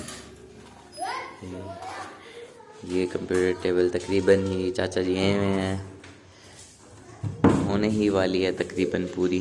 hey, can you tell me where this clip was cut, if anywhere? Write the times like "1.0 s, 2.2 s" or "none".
none